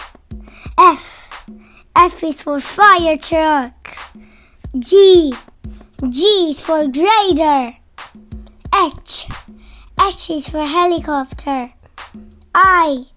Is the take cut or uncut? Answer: uncut